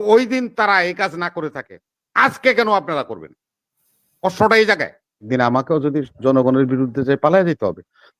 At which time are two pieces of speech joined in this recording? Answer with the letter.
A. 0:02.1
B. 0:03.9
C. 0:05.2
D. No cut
C